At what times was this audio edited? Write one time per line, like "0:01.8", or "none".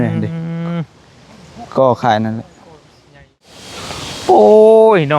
0:03.5